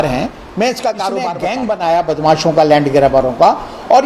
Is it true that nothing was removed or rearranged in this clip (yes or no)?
no